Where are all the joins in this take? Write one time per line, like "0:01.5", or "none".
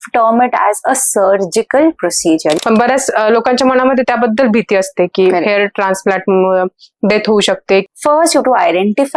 0:02.6
0:07.9